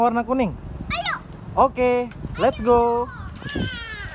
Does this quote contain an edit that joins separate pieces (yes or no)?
yes